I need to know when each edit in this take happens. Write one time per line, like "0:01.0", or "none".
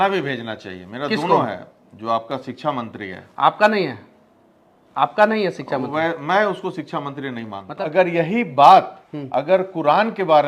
0:07.6